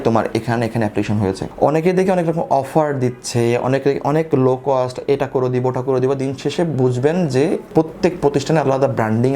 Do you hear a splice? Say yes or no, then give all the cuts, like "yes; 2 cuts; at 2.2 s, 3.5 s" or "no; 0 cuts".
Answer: yes; 1 cut; at 1.4 s